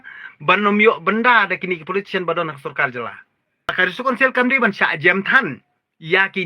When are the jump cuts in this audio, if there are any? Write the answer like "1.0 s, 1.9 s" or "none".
3.8 s